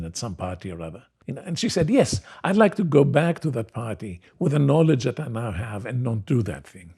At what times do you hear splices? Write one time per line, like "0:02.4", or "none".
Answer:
0:01.1